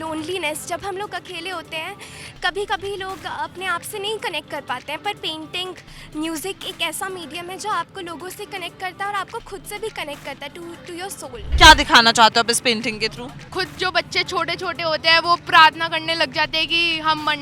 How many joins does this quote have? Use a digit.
2